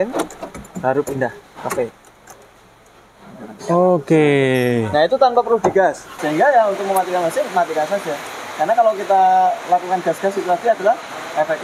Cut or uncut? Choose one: cut